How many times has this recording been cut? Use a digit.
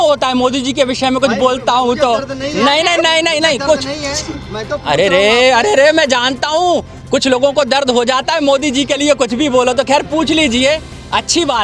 0